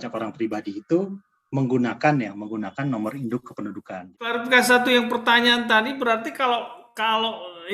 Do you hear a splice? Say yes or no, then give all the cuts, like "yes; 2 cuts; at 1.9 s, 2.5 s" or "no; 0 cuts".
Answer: yes; 1 cut; at 4.1 s